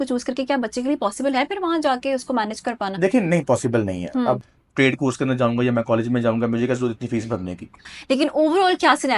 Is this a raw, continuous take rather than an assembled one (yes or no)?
no